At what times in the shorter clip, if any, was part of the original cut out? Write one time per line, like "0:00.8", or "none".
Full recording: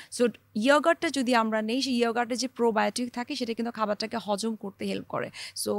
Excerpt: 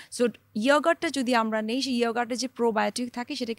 none

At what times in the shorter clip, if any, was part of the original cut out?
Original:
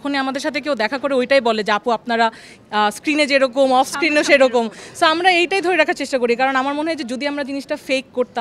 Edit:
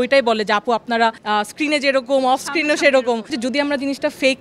0:01.2
0:03.3

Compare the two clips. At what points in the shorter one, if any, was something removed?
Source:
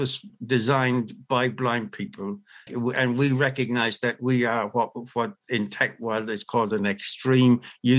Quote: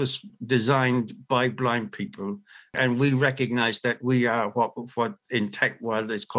0:02.7

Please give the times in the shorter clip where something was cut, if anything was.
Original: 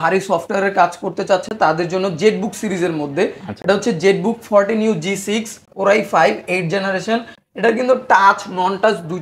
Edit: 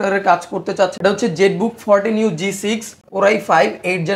0:00.9

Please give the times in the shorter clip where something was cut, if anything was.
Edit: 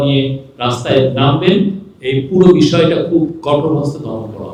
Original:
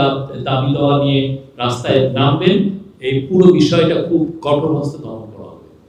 none

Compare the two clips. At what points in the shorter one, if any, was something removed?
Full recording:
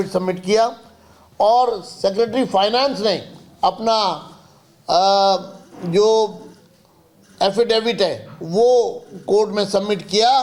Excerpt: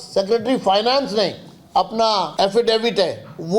0:02.3

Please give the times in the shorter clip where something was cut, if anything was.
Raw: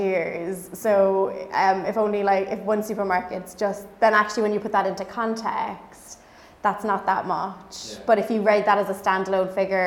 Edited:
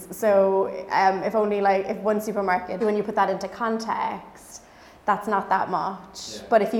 0:02.8

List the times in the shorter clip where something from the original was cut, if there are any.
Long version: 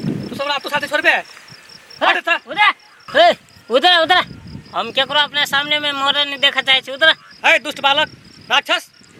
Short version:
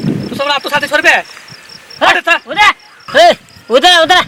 none

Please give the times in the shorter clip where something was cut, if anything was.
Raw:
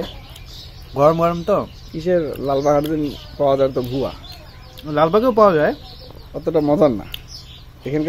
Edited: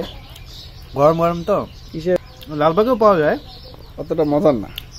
0:02.2

